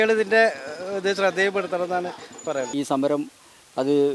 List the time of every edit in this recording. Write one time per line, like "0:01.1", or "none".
0:02.7